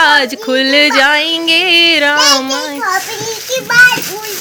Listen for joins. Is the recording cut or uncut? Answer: uncut